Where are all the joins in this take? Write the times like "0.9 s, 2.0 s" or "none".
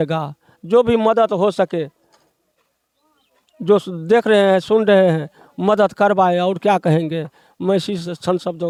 none